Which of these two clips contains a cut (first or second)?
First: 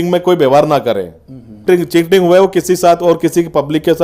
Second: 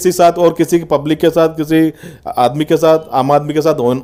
first